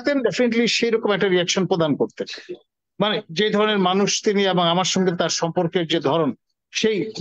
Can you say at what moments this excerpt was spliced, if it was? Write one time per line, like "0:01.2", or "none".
none